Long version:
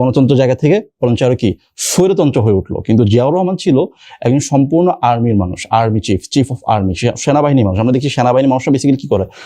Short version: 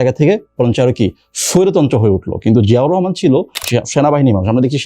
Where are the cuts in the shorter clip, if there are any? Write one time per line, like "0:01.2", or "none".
0:03.6